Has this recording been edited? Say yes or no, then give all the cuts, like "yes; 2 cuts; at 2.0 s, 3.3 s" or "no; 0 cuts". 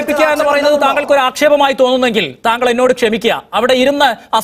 no; 0 cuts